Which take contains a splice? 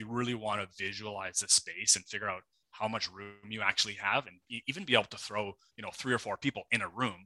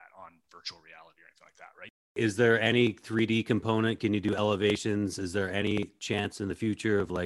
second; 1 cut; at 2.1 s

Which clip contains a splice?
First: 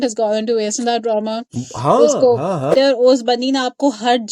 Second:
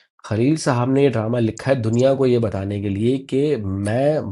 first; 1 cut; at 2.7 s

